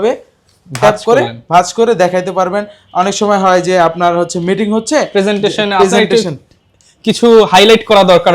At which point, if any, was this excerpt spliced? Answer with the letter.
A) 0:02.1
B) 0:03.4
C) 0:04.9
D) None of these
D